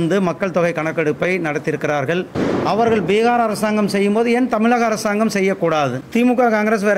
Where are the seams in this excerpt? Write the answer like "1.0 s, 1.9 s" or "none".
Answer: 6.0 s